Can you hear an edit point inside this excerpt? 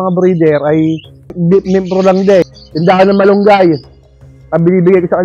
yes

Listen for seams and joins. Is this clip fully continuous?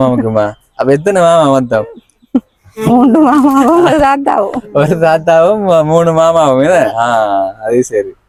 yes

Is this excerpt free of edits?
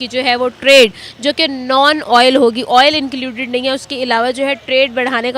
yes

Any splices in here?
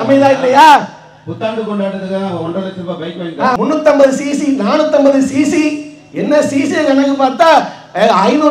no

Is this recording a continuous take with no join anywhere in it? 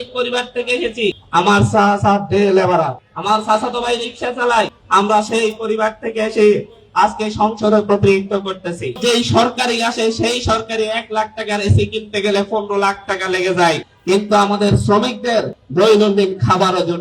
no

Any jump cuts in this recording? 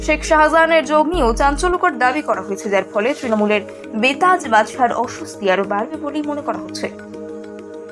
yes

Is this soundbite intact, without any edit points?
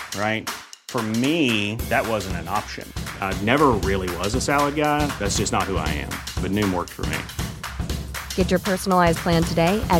yes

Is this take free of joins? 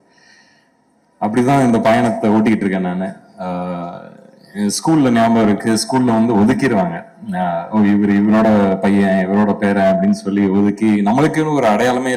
yes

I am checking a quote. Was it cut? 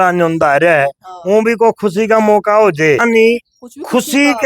yes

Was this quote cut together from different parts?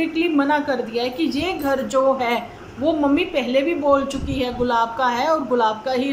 no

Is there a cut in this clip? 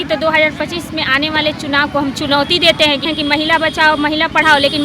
yes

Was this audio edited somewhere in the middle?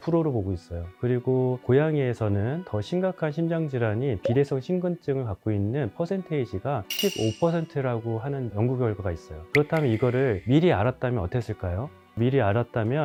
no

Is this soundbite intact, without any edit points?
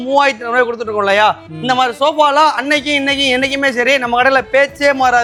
yes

